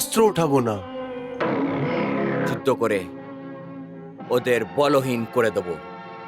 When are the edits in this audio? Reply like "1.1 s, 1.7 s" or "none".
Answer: 2.5 s

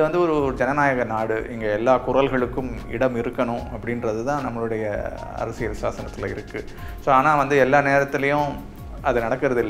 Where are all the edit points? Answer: none

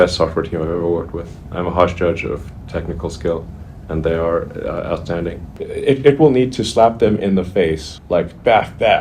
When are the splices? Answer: 5.6 s

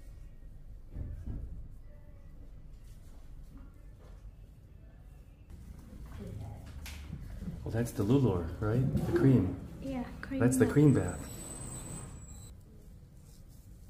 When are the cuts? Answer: 5.5 s, 12.5 s

